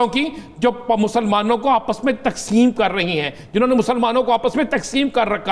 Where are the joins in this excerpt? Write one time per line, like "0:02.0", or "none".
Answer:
none

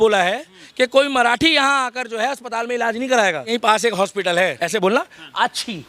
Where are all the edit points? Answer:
0:03.5
0:04.7

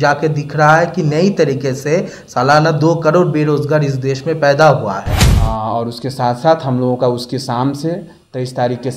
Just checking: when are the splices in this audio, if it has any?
0:05.2

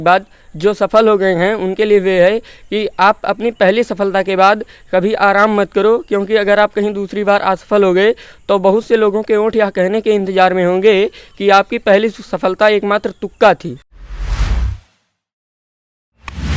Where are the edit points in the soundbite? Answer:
0:14.0

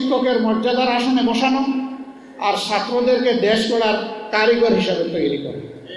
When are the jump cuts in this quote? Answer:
none

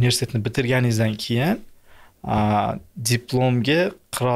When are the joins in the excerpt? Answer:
none

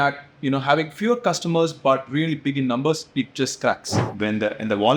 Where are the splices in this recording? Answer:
0:04.1

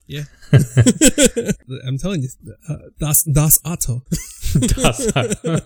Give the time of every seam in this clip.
0:01.6

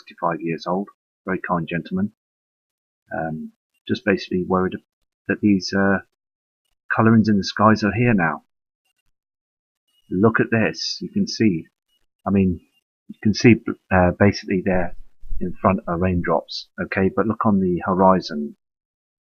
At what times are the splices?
0:09.8

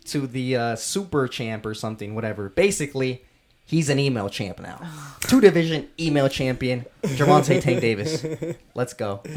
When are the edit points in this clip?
none

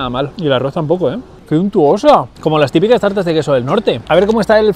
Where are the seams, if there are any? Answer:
0:01.3
0:04.0

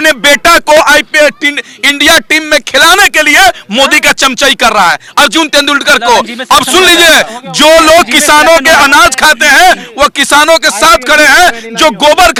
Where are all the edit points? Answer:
none

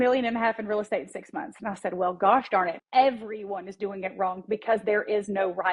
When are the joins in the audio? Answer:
0:02.8

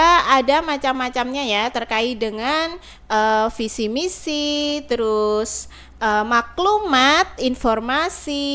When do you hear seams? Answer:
none

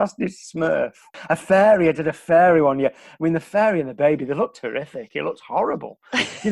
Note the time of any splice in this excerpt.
0:01.1

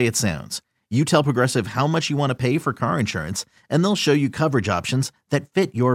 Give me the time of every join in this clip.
none

